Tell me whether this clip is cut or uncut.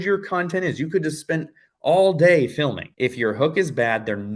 cut